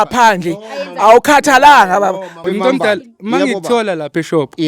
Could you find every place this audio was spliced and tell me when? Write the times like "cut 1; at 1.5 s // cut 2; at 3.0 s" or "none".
cut 1; at 2.5 s